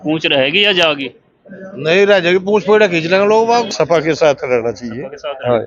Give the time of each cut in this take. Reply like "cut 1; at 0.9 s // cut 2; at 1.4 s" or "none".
cut 1; at 3.7 s

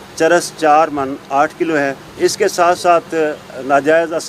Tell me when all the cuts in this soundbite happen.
cut 1; at 2.0 s

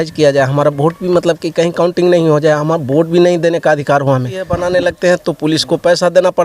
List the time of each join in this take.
cut 1; at 4.7 s

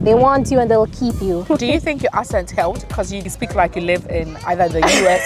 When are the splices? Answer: cut 1; at 1.4 s // cut 2; at 3.2 s

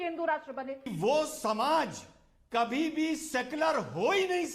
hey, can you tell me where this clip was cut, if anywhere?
cut 1; at 0.9 s

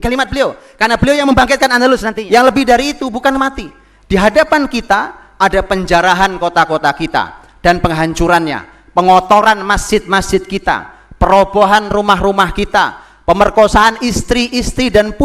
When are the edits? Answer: cut 1; at 2.1 s

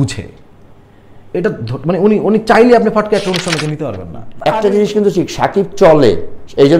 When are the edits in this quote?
cut 1; at 4.1 s

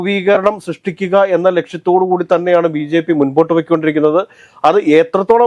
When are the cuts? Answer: none

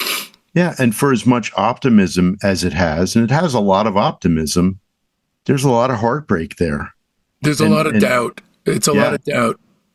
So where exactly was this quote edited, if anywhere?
none

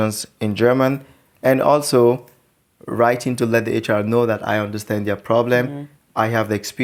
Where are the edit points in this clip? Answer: none

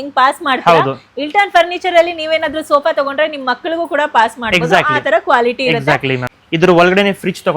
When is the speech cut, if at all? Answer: cut 1; at 6.3 s

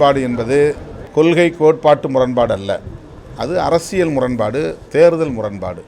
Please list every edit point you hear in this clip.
cut 1; at 0.9 s

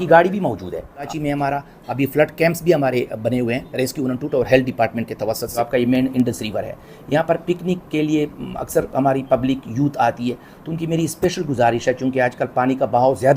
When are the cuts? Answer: cut 1; at 1.1 s // cut 2; at 5.6 s

